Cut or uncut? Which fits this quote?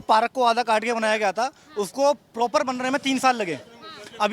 uncut